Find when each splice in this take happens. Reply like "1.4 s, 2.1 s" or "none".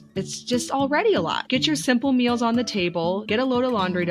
1.4 s, 3.2 s